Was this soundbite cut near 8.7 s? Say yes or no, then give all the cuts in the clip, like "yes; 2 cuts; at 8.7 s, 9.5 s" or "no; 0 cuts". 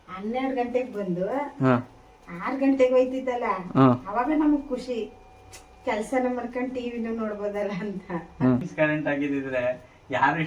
yes; 1 cut; at 8.7 s